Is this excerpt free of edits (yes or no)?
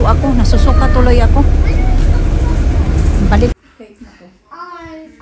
no